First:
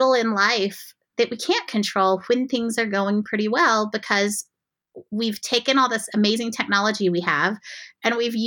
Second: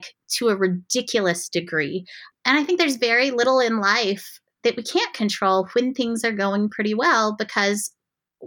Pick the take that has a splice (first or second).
second